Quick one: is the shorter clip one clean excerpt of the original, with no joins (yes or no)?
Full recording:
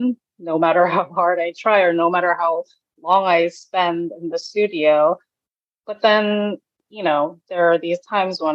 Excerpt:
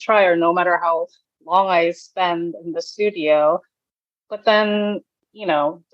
yes